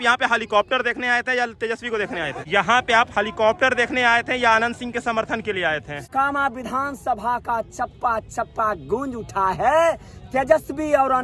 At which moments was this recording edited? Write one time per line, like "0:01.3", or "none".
0:02.4
0:06.1